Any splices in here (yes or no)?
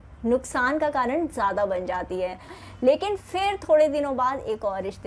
yes